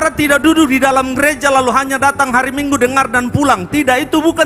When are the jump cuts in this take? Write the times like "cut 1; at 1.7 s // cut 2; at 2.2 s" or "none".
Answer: none